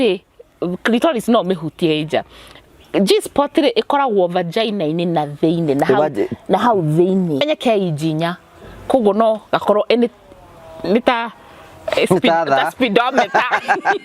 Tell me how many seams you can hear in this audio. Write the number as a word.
one